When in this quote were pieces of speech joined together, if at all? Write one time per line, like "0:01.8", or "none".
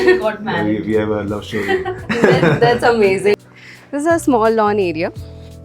0:03.3